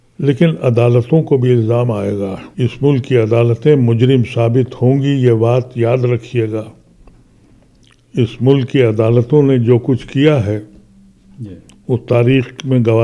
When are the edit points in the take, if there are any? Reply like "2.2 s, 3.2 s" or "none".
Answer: 2.4 s